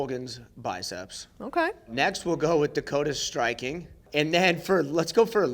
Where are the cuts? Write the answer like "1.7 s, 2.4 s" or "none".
1.9 s, 4.0 s